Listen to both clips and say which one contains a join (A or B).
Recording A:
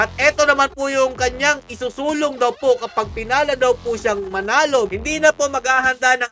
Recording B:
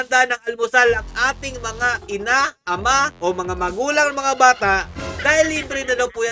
A